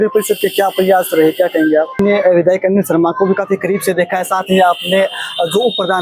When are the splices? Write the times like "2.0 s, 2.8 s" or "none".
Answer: 1.9 s